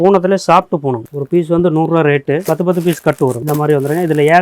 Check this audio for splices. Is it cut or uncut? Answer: cut